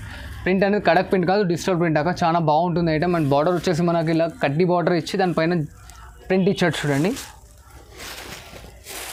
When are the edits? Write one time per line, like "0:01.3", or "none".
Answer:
none